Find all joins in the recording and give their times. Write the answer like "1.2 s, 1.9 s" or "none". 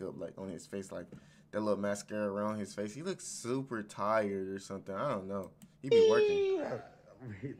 none

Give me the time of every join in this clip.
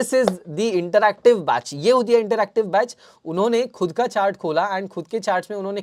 none

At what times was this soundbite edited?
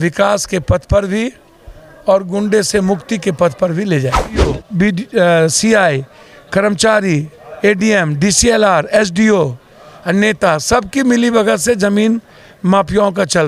4.6 s

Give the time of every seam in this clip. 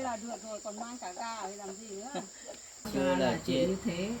2.9 s

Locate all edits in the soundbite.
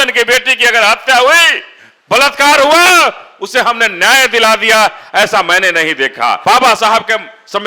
6.4 s

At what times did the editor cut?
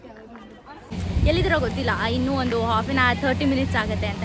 0.9 s

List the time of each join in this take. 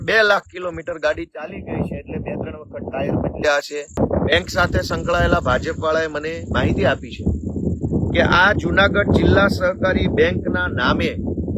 4.0 s

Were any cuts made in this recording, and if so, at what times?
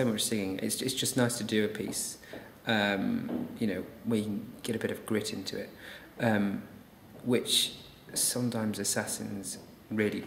none

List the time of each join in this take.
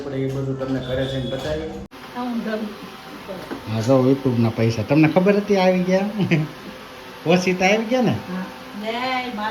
1.8 s

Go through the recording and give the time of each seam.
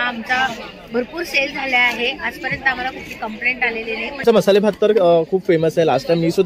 4.2 s

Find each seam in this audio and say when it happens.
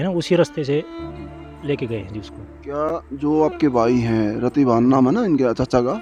none

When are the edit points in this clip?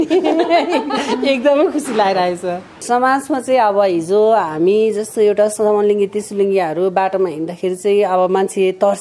2.7 s

